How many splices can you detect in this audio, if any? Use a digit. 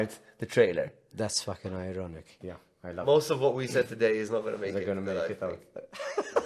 0